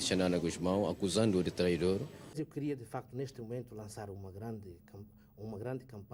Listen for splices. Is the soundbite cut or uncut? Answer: cut